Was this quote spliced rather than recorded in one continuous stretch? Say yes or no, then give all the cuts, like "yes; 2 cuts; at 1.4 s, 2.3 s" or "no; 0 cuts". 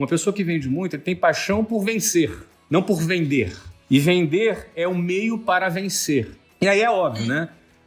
no; 0 cuts